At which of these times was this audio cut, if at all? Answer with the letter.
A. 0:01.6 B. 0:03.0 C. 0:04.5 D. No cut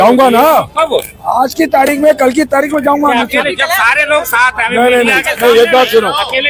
D